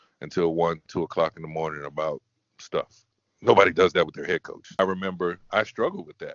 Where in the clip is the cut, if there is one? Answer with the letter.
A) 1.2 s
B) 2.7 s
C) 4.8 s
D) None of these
C